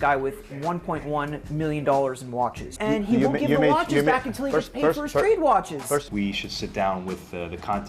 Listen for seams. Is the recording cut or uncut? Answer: cut